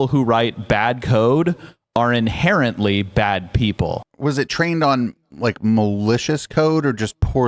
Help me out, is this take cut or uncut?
cut